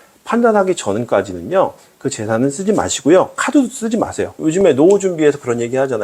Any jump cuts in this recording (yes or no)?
yes